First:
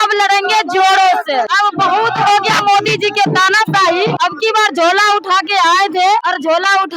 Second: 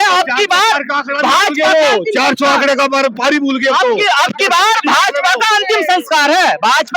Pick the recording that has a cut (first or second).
first